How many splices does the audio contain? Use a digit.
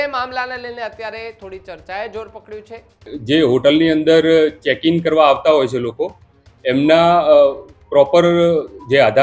1